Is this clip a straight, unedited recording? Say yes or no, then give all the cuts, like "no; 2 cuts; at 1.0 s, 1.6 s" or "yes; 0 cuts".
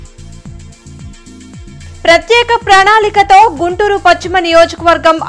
no; 1 cut; at 1.4 s